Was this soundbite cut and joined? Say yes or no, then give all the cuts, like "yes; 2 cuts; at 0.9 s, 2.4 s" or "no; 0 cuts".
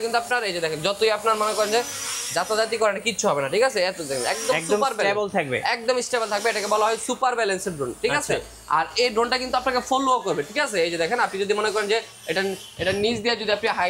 no; 0 cuts